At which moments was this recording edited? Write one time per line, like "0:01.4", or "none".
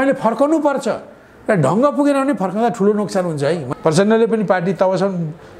0:03.6